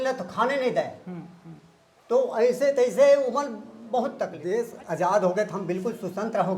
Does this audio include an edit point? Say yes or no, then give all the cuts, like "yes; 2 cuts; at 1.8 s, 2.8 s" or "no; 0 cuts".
yes; 1 cut; at 4.4 s